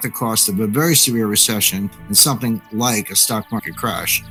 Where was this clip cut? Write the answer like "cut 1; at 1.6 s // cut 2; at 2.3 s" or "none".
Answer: none